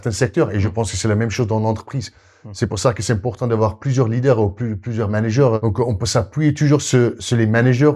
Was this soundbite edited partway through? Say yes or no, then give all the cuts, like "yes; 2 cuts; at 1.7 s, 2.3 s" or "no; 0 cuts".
yes; 1 cut; at 5.6 s